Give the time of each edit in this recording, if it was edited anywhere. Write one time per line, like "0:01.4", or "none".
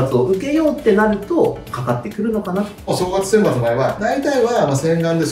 0:02.9
0:04.0